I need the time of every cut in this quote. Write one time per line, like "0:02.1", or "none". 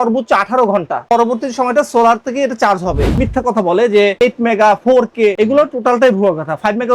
0:01.0
0:03.1
0:04.1